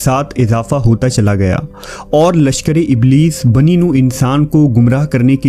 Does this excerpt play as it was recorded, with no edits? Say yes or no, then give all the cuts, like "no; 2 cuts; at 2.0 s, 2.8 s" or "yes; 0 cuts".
yes; 0 cuts